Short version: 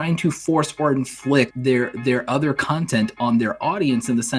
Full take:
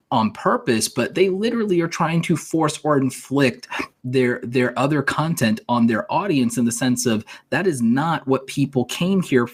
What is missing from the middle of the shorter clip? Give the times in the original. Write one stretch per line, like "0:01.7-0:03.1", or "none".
0:03.6-0:04.0